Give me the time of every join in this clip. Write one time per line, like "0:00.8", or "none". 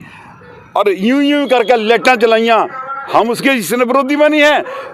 none